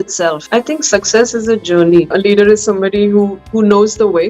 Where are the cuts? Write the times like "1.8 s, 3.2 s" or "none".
2.1 s